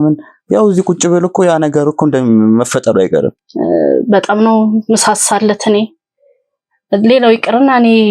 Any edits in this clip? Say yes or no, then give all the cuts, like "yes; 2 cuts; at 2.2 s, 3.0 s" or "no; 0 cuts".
yes; 1 cut; at 3.4 s